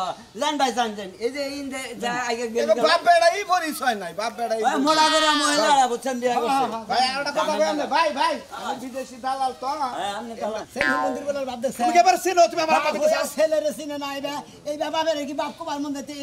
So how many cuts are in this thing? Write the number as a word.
one